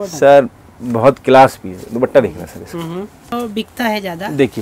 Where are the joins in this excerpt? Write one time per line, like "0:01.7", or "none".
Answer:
0:03.3